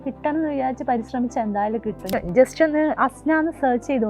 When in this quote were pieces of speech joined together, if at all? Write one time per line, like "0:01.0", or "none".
0:02.1